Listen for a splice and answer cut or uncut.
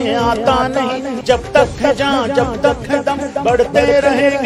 uncut